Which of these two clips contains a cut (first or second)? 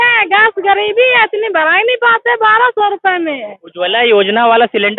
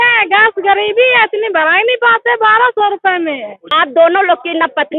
second